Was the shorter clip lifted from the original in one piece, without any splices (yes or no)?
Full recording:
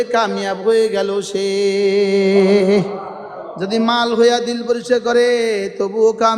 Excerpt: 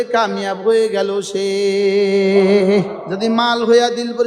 no